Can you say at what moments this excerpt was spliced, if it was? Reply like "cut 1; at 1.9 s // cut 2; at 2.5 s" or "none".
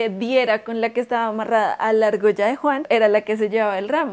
cut 1; at 2.8 s